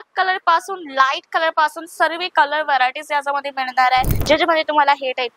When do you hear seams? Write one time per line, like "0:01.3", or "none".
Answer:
0:04.2